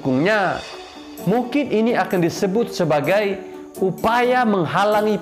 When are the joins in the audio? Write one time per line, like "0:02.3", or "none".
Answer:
none